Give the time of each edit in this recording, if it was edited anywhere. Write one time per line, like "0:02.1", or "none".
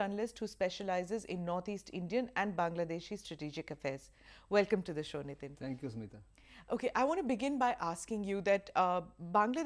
0:03.9